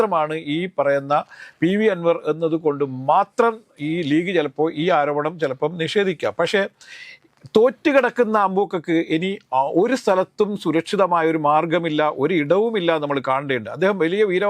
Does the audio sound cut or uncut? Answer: uncut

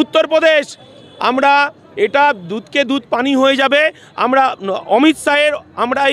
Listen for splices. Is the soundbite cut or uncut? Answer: uncut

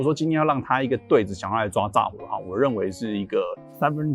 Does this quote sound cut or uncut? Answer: uncut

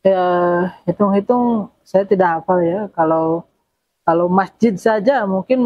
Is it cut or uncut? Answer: uncut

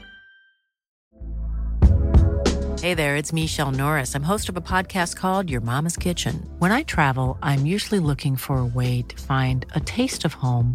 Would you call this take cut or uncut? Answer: cut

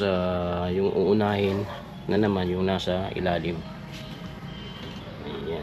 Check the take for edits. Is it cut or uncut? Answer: uncut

